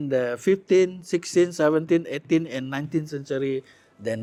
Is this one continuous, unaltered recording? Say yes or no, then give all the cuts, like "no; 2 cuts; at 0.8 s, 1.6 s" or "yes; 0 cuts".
yes; 0 cuts